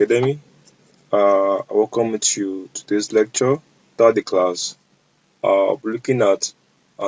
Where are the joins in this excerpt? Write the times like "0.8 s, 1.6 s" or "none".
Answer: 3.9 s